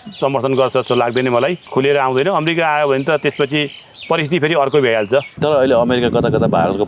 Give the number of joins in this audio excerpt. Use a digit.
2